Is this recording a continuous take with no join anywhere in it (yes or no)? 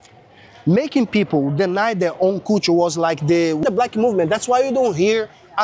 no